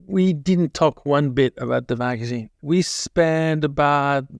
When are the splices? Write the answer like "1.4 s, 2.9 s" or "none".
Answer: none